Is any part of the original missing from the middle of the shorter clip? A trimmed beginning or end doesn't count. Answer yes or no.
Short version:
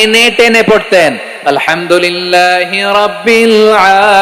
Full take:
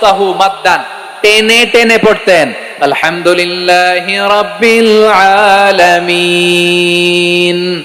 no